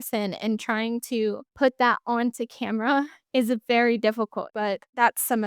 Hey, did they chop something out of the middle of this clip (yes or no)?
yes